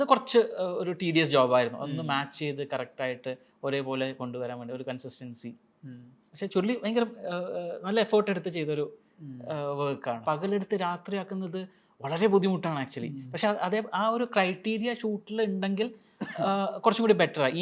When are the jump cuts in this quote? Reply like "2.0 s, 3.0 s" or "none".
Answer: 10.2 s